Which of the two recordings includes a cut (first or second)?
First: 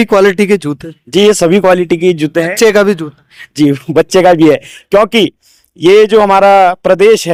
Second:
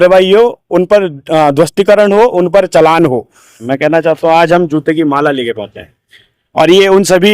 second